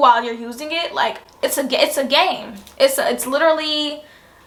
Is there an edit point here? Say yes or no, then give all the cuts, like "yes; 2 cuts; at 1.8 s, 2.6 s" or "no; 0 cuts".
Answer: no; 0 cuts